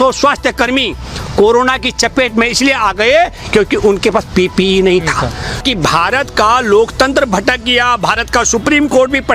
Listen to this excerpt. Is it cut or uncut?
cut